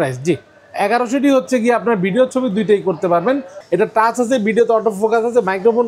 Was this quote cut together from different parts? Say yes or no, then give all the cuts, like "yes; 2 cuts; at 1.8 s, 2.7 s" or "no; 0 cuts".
yes; 1 cut; at 3.5 s